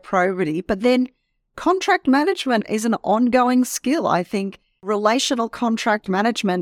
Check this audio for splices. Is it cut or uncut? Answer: cut